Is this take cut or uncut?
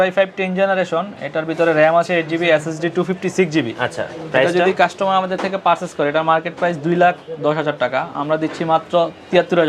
uncut